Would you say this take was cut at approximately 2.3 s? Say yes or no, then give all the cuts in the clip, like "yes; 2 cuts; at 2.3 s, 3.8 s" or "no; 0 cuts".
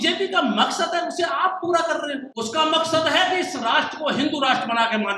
yes; 1 cut; at 2.3 s